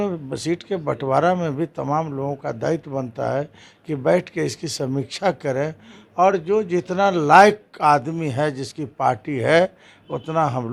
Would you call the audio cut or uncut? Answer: uncut